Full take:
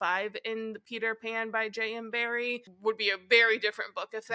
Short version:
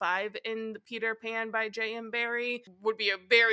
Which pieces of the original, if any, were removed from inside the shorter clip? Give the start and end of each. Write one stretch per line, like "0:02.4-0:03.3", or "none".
none